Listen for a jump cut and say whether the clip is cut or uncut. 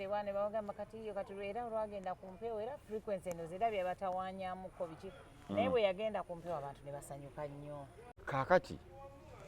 cut